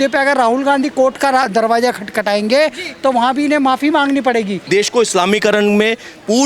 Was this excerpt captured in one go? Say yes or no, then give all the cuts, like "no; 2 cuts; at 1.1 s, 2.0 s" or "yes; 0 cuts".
no; 1 cut; at 4.6 s